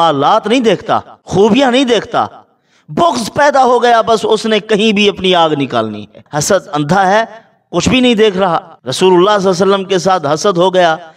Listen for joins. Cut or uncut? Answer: cut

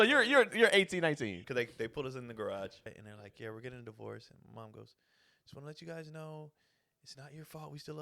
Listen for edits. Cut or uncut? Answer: cut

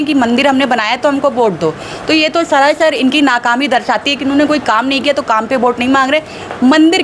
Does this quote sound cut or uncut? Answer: uncut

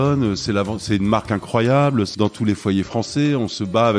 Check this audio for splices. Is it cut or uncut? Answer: cut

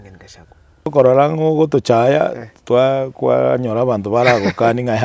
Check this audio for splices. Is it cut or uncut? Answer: cut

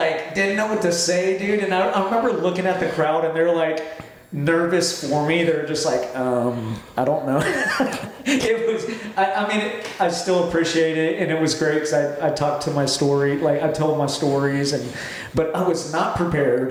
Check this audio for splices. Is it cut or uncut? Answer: uncut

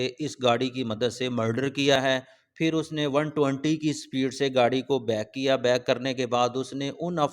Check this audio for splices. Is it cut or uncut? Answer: cut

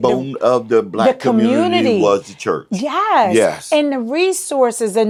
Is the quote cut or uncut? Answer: uncut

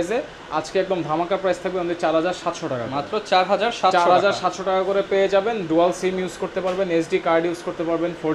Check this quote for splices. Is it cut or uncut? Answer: uncut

